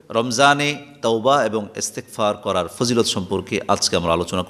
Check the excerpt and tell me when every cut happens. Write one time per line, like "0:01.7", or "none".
none